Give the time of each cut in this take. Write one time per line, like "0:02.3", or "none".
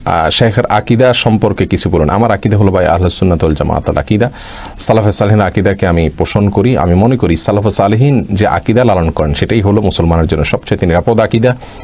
none